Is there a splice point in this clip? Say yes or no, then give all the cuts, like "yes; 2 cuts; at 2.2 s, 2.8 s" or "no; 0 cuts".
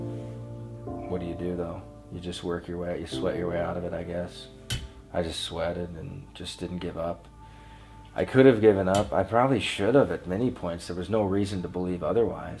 yes; 1 cut; at 1.1 s